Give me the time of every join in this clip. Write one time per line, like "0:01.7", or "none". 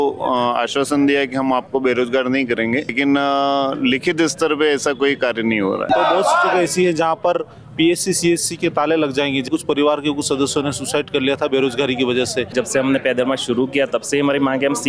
0:05.9
0:09.5
0:12.5